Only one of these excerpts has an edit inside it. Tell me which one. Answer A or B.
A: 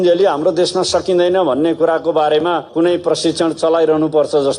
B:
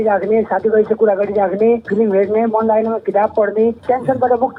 B